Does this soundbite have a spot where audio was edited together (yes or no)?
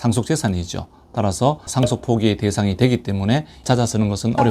yes